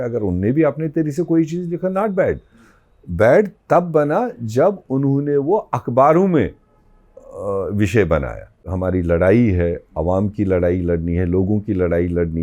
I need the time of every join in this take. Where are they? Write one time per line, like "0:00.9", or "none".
0:08.7